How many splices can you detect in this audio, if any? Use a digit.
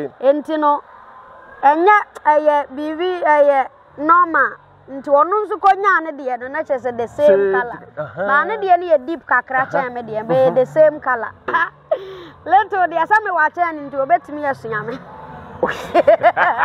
1